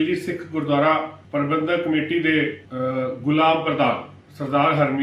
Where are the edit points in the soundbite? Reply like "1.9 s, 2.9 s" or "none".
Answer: 1.2 s, 2.6 s